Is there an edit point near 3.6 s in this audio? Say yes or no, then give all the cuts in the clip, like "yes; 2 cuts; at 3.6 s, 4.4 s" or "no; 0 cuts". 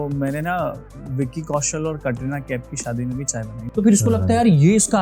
yes; 1 cut; at 3.6 s